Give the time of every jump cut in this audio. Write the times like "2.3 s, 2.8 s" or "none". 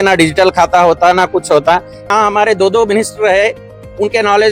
2.1 s